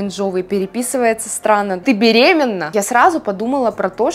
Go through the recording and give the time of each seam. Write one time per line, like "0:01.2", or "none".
0:01.8
0:02.6